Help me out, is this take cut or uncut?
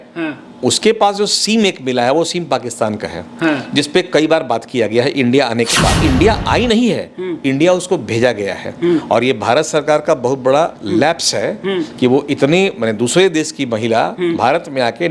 cut